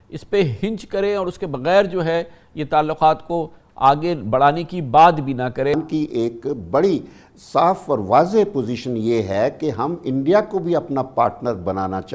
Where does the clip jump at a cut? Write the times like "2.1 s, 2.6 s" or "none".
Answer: 5.7 s